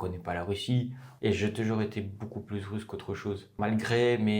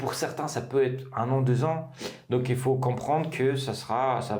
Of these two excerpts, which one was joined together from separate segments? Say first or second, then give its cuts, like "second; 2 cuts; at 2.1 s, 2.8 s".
first; 2 cuts; at 1.1 s, 3.5 s